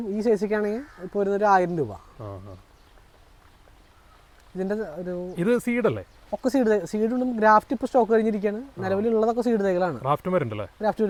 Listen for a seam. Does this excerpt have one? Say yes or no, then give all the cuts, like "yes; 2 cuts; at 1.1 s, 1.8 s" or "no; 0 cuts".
no; 0 cuts